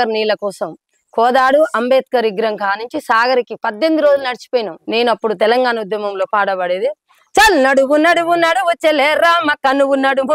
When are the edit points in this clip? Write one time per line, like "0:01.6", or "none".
0:04.8